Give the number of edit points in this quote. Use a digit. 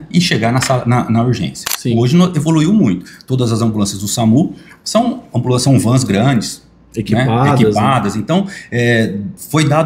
1